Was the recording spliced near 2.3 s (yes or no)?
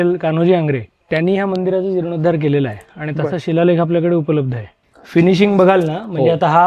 no